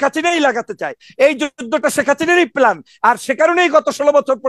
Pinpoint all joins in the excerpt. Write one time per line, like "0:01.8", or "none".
none